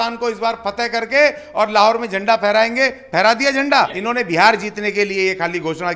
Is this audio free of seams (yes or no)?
no